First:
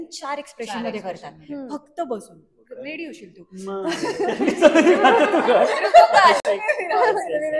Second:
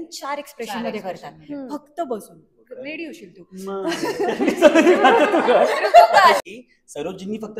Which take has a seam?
second; 1 cut; at 6.4 s

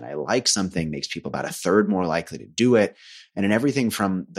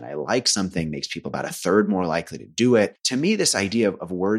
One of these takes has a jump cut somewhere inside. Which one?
second; 1 cut; at 3.0 s

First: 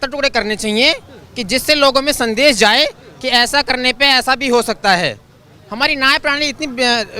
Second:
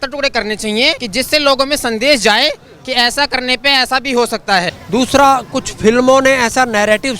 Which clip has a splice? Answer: second; 2 cuts; at 1.0 s, 4.8 s

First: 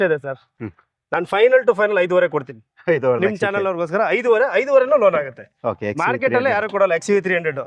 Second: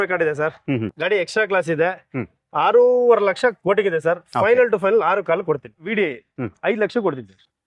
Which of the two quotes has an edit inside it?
second; 1 cut; at 5.9 s

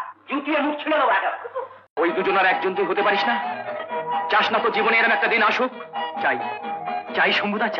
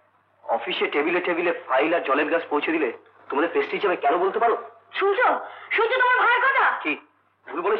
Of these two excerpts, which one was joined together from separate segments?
first; 1 cut; at 1.9 s

